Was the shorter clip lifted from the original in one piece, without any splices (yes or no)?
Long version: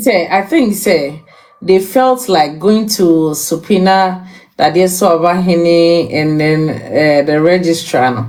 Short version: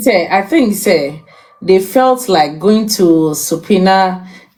yes